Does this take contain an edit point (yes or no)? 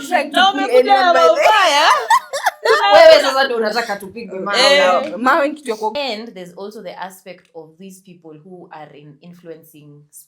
yes